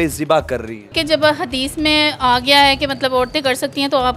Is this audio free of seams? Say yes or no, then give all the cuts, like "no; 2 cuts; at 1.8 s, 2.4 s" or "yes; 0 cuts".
no; 1 cut; at 0.9 s